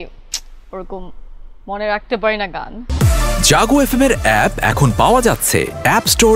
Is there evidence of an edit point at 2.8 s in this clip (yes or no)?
yes